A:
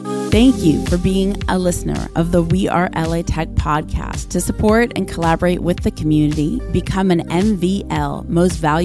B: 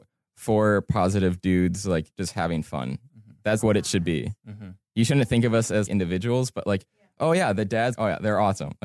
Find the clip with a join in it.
B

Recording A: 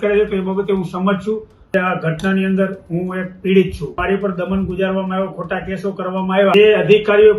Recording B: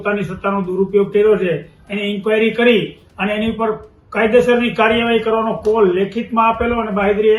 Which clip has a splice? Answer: A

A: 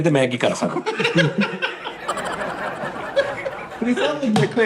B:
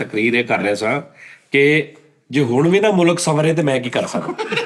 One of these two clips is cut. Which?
A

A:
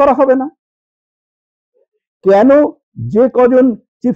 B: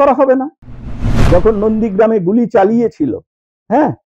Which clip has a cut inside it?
B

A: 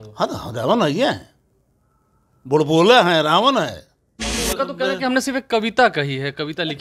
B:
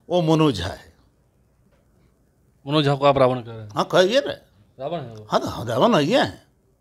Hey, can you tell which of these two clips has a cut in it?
A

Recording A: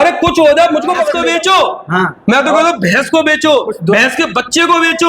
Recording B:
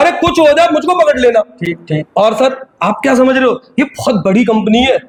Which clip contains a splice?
A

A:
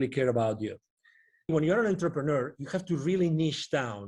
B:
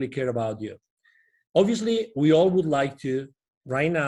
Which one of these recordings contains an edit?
A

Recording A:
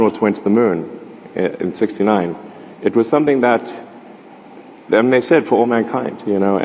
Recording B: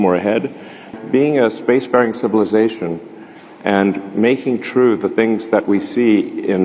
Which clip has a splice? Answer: B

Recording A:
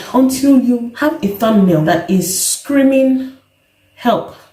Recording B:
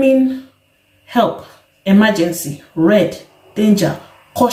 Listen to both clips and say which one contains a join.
A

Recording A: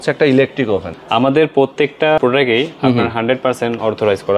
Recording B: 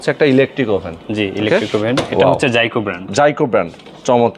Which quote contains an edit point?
A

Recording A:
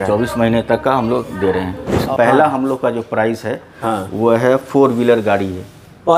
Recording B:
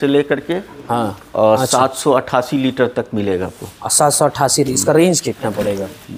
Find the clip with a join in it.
A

